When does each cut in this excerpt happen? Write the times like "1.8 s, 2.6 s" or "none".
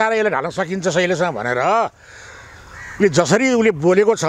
none